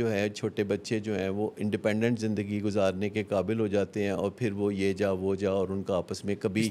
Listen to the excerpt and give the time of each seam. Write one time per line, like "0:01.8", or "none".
none